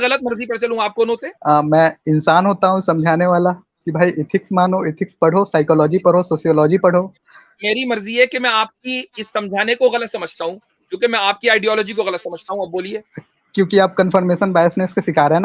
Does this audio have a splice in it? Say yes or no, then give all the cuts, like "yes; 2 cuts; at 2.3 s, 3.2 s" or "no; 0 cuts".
yes; 1 cut; at 1.3 s